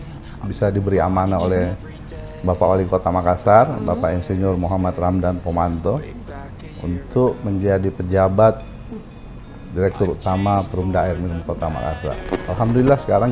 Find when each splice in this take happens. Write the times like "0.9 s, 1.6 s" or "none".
12.4 s